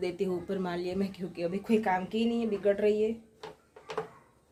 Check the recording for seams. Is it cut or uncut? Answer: uncut